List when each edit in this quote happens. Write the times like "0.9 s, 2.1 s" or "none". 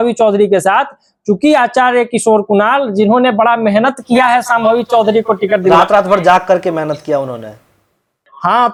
none